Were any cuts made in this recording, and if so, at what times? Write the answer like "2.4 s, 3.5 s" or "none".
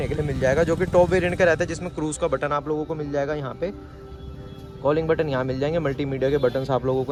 none